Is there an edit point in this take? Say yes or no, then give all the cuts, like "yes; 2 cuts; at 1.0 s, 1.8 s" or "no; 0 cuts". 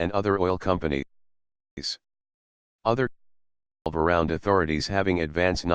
yes; 1 cut; at 4.4 s